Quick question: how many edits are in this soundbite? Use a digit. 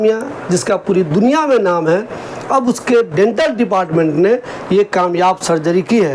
0